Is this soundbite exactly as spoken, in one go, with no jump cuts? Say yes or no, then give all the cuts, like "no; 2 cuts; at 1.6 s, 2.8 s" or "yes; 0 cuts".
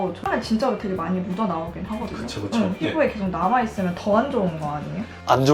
yes; 0 cuts